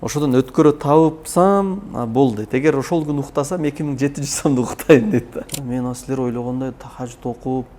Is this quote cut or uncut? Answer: cut